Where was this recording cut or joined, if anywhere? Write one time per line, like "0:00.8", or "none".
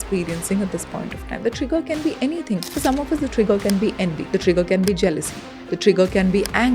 0:02.7
0:04.2